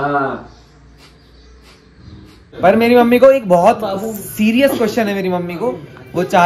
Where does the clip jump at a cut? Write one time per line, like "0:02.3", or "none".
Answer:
0:02.6